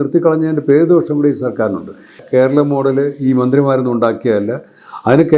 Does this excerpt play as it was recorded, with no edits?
no; 1 cut; at 2.2 s

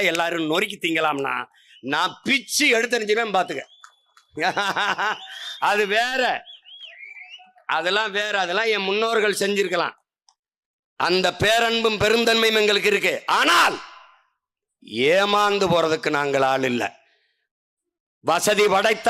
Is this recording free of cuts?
yes; 0 cuts

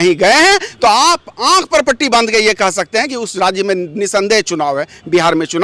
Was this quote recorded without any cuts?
yes; 0 cuts

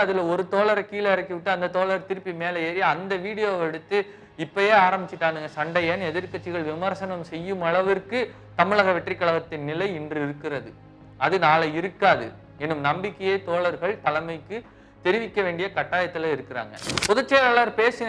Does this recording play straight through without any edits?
yes; 0 cuts

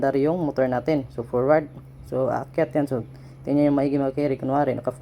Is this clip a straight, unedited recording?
yes; 0 cuts

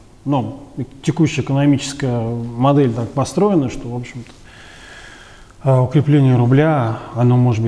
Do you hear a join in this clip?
no; 0 cuts

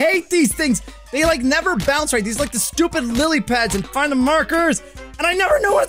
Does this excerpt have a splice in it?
no; 0 cuts

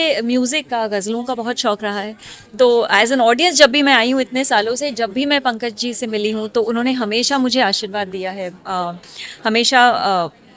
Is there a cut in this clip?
no; 0 cuts

